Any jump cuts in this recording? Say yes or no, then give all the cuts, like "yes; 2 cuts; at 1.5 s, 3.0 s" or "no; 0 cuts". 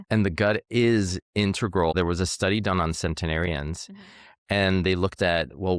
yes; 1 cut; at 1.9 s